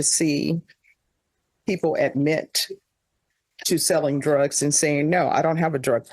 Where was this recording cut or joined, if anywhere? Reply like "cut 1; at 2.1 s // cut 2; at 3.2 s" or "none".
none